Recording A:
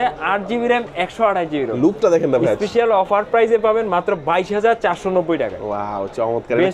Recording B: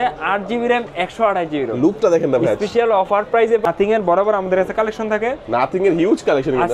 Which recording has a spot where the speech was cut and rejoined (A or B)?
B